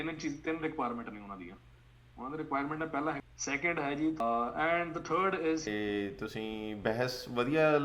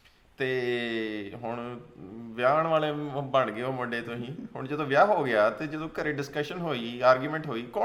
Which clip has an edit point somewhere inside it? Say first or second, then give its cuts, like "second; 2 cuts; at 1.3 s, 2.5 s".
first; 3 cuts; at 3.2 s, 4.2 s, 5.7 s